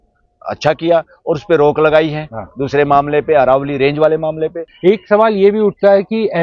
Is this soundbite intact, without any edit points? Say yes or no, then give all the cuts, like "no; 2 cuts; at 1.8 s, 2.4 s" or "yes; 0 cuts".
no; 1 cut; at 4.7 s